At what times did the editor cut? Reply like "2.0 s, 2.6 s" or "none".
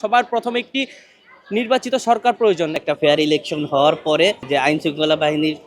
2.8 s, 4.4 s